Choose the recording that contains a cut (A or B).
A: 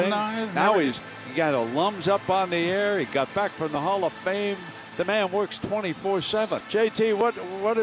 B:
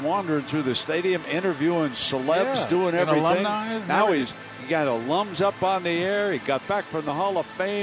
A